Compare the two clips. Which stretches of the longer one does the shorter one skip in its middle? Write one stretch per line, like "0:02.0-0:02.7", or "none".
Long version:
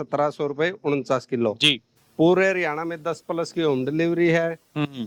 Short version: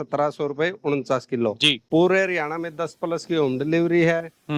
0:01.8-0:02.1